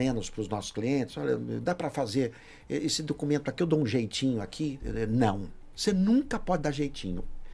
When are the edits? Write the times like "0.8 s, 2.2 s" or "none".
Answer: 4.8 s